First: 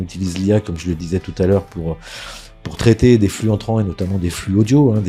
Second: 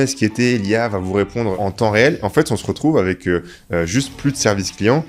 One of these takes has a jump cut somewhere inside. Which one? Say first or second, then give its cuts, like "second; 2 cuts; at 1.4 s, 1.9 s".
second; 1 cut; at 1.5 s